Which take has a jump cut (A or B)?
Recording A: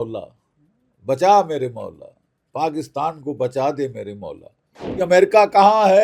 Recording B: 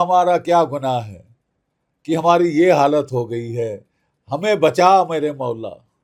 A